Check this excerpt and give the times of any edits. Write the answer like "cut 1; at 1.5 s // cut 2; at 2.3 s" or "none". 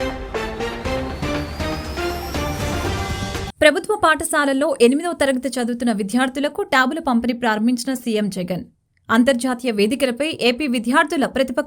cut 1; at 3.5 s

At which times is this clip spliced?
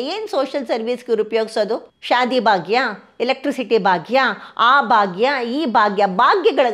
cut 1; at 1.9 s

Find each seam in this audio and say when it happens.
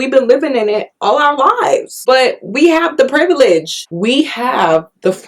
cut 1; at 1.9 s // cut 2; at 3.8 s

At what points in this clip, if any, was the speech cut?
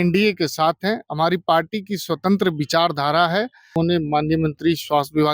cut 1; at 3.7 s

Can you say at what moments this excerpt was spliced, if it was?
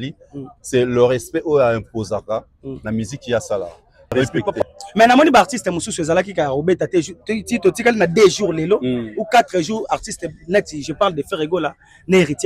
cut 1; at 4.6 s

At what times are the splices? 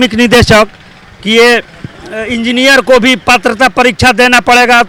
none

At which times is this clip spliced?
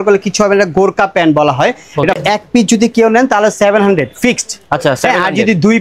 cut 1; at 2.2 s

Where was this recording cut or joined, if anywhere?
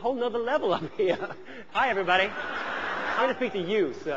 cut 1; at 1.6 s // cut 2; at 3.1 s

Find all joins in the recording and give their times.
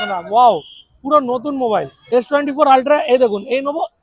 cut 1; at 2.0 s

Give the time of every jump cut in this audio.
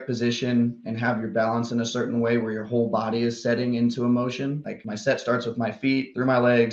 none

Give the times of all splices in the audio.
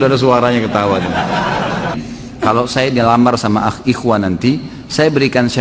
cut 1; at 2.0 s

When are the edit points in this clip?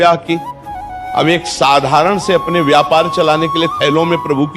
cut 1; at 0.9 s

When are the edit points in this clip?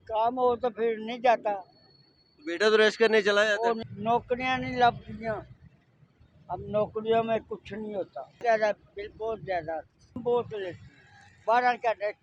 cut 1; at 3.9 s // cut 2; at 8.4 s // cut 3; at 10.2 s

